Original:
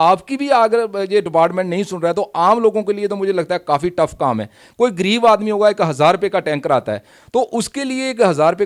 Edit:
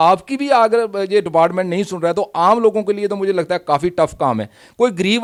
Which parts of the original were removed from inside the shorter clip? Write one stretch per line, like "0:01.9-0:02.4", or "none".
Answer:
none